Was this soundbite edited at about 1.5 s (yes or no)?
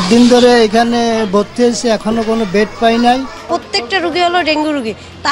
no